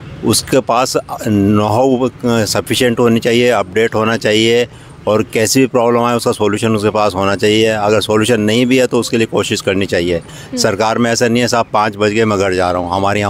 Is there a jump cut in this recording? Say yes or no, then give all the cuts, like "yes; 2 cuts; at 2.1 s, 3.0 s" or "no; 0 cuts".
no; 0 cuts